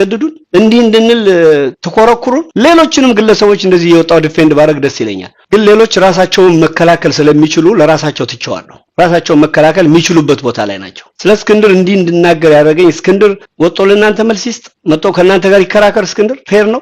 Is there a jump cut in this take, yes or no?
no